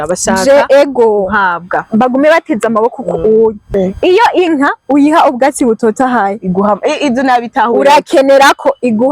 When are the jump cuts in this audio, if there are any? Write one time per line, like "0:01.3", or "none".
0:03.6